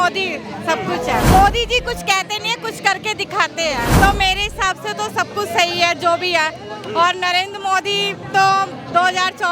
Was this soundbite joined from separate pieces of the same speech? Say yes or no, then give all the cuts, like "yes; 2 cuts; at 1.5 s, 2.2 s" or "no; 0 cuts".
yes; 2 cuts; at 1.3 s, 3.9 s